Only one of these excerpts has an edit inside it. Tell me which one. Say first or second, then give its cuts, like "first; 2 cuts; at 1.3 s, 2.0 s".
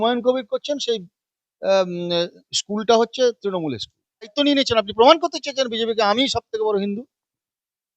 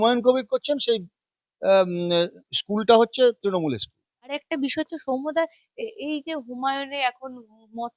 first; 1 cut; at 4.3 s